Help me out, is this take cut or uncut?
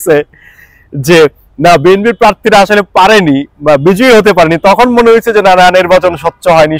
uncut